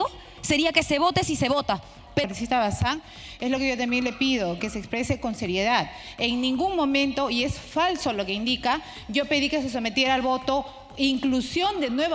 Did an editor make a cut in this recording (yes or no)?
yes